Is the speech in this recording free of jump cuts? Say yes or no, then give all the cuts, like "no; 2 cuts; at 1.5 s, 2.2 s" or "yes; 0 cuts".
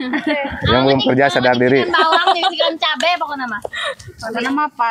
yes; 0 cuts